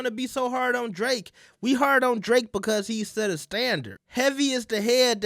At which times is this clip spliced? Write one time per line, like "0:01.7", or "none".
0:04.0